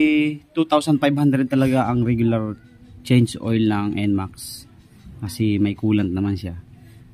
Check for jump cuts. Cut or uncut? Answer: uncut